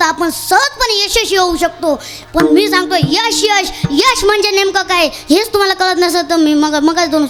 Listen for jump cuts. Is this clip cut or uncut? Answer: uncut